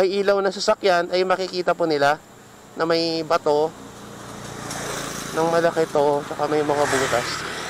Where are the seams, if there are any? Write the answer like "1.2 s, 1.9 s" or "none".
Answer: none